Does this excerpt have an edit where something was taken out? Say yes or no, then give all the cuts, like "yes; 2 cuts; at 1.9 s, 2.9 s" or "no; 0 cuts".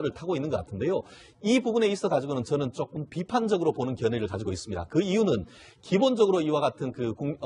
yes; 1 cut; at 2.8 s